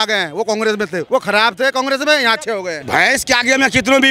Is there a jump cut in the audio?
yes; 2 cuts; at 1.0 s, 2.8 s

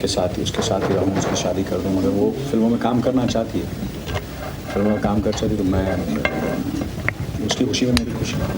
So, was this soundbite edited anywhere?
no; 0 cuts

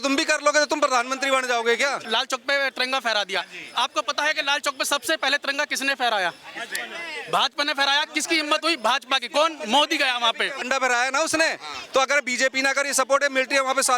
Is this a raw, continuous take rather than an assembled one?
no; 2 cuts; at 2.0 s, 10.6 s

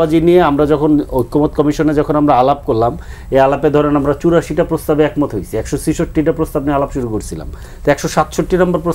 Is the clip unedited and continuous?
yes; 0 cuts

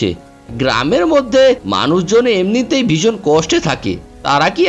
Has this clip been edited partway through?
no; 0 cuts

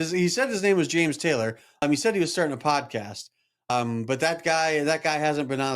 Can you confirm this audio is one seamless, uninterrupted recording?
no; 2 cuts; at 1.8 s, 3.7 s

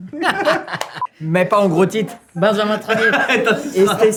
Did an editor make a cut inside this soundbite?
no; 0 cuts

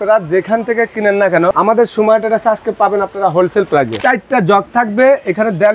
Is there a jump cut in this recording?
yes; 2 cuts; at 1.5 s, 3.9 s

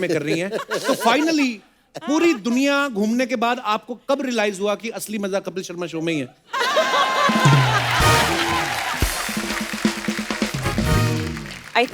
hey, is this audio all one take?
yes; 0 cuts

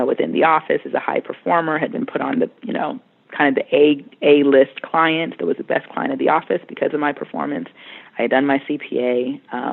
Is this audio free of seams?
yes; 0 cuts

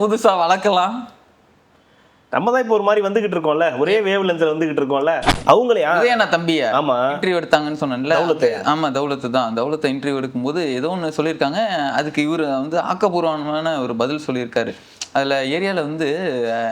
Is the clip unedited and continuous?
no; 1 cut; at 5.3 s

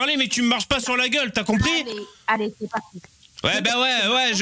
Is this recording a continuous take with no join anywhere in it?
yes; 0 cuts

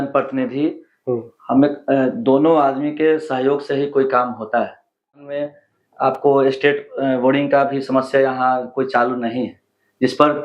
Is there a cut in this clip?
yes; 1 cut; at 5.2 s

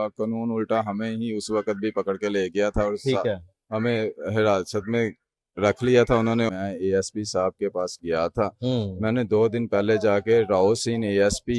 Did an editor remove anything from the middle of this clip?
yes; 1 cut; at 6.5 s

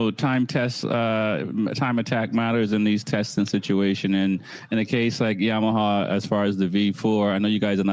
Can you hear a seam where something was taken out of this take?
no; 0 cuts

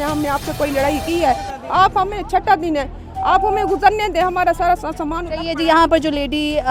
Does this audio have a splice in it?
no; 0 cuts

